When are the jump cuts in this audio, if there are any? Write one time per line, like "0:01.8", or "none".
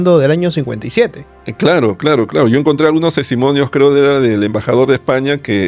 none